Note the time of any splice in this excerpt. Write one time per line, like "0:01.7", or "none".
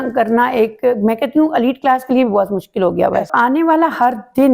0:03.3